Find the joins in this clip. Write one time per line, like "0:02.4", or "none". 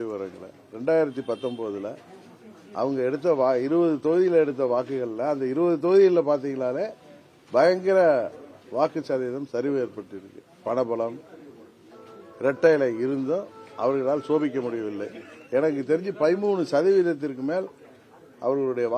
none